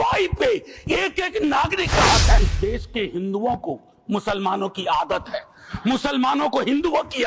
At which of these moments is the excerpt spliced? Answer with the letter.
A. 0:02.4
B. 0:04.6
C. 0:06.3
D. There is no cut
A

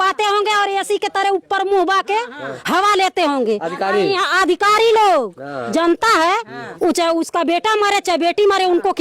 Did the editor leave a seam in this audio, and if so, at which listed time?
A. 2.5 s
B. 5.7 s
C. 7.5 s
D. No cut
B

